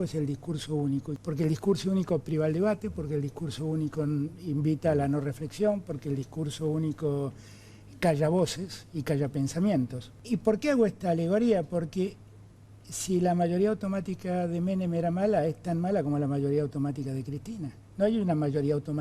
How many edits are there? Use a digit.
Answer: 2